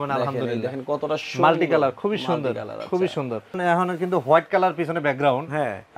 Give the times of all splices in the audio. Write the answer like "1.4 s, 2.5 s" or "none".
3.6 s